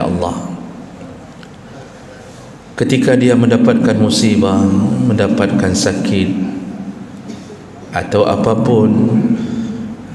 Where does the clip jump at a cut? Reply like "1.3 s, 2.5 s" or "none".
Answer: none

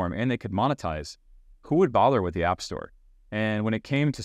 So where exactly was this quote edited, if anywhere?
none

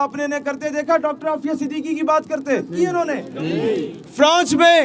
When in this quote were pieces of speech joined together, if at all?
2.7 s

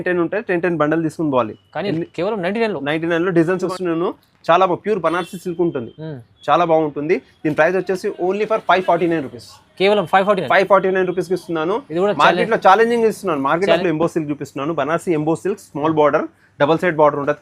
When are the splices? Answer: 3.7 s, 13.8 s

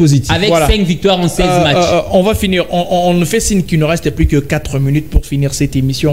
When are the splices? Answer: none

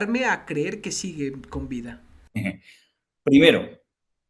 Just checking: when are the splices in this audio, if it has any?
none

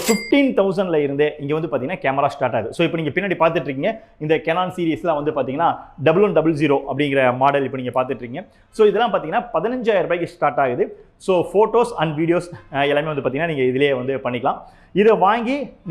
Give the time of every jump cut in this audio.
none

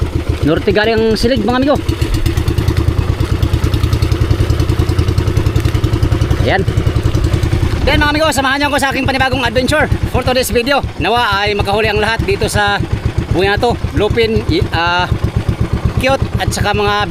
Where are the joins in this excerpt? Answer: none

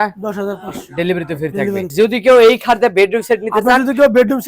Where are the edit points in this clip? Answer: 1.9 s

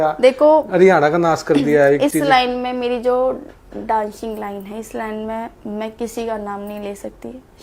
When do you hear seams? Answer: none

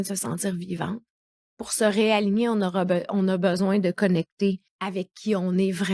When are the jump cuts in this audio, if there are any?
4.7 s

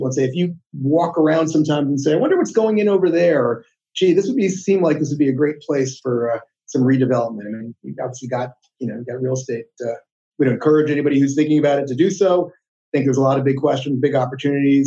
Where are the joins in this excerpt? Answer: 10.1 s

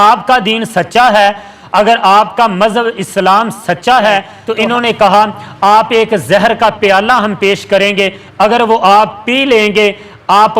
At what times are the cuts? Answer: 4.4 s

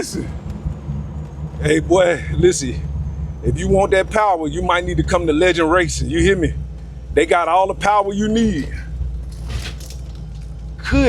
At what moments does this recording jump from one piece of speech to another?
none

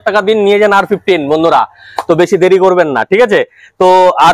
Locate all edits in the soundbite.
none

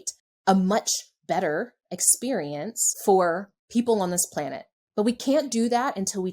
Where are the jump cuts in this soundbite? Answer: 2.8 s, 3.5 s

